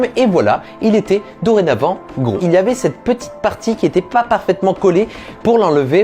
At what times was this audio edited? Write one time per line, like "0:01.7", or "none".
0:02.4